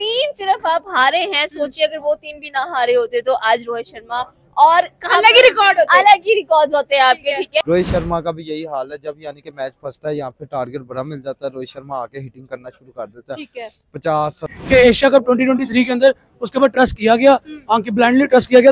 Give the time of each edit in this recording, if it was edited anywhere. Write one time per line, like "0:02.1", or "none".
0:07.6
0:14.5

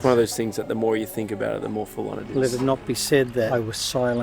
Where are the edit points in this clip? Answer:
0:02.3
0:03.5

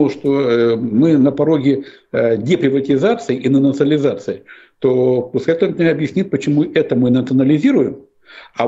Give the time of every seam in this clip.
none

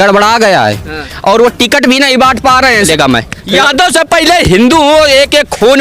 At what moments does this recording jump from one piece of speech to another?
0:02.9

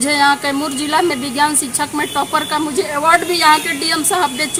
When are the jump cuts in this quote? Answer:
none

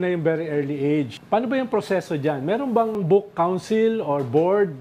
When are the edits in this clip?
0:01.2
0:03.0

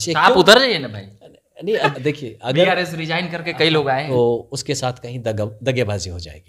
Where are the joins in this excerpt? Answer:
0:01.9
0:04.0

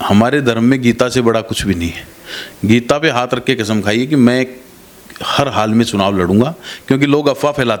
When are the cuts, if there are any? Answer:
none

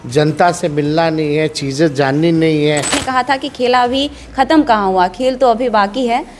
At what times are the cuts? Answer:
0:03.0

